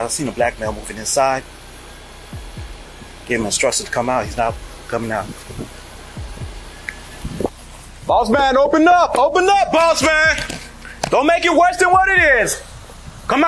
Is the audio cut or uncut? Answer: uncut